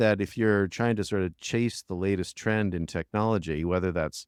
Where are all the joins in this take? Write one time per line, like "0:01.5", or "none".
none